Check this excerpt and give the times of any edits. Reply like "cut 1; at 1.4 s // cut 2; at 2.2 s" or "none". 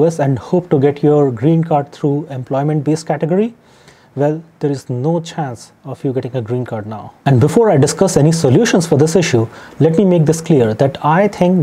none